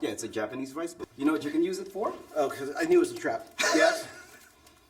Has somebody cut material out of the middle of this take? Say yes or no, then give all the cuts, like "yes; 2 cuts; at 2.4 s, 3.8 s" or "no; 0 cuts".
yes; 2 cuts; at 1.0 s, 2.2 s